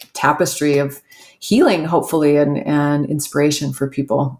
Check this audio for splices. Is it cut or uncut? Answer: uncut